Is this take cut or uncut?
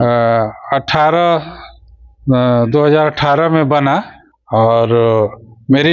cut